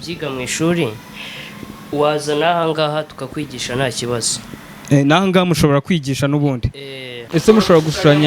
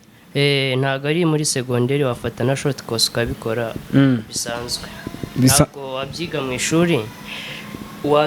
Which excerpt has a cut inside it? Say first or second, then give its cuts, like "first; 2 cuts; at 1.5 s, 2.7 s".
first; 1 cut; at 7.3 s